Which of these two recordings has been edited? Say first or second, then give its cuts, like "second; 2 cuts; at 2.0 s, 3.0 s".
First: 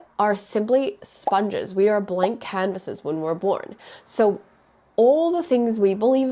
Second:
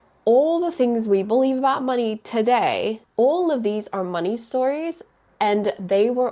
second; 1 cut; at 3.0 s